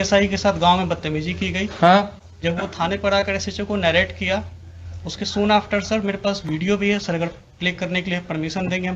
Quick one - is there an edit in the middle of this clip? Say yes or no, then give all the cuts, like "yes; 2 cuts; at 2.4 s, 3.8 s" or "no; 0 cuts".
no; 0 cuts